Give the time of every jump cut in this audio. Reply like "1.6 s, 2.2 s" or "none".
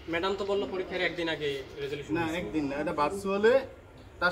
none